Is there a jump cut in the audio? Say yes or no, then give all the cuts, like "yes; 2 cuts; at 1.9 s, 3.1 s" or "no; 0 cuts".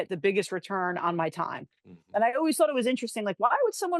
no; 0 cuts